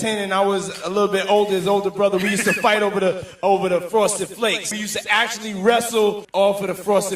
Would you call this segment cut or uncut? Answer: cut